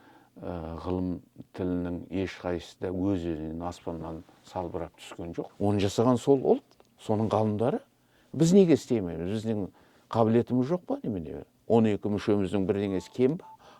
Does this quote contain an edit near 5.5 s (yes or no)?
yes